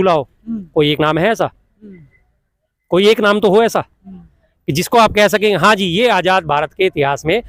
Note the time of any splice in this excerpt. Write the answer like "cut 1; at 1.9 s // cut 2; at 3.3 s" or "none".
none